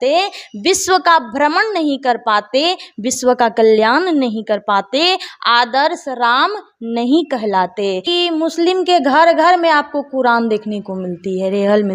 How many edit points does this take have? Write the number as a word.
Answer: one